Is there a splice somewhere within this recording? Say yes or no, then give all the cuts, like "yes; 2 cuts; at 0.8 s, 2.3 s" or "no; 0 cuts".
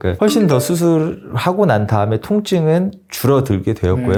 no; 0 cuts